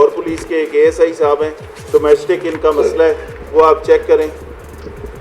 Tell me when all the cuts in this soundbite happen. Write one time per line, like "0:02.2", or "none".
none